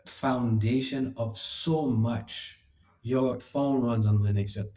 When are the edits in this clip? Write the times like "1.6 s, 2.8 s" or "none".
3.4 s